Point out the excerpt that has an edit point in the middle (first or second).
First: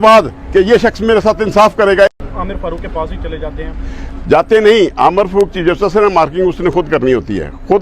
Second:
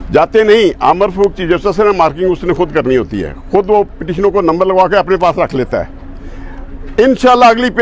first